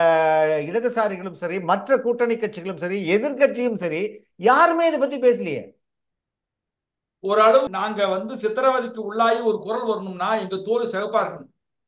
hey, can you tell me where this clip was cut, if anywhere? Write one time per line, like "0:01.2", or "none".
0:07.7